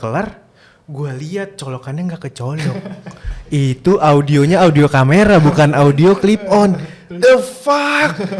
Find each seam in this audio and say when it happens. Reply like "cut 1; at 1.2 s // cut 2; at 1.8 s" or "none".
none

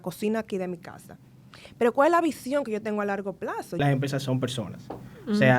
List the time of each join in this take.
cut 1; at 3.8 s

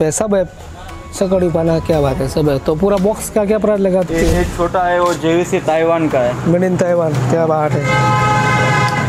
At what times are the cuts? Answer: cut 1; at 4.1 s

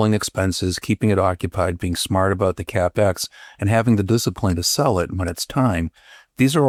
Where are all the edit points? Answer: none

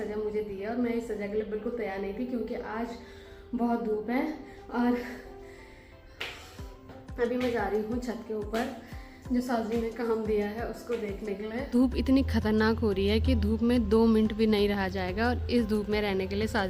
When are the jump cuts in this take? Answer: none

